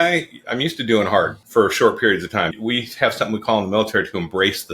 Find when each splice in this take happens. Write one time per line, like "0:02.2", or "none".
0:01.4